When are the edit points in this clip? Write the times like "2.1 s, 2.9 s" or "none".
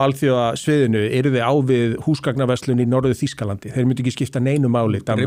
none